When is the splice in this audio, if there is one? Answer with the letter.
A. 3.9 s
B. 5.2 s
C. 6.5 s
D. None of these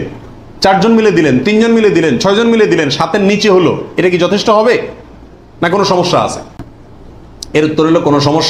D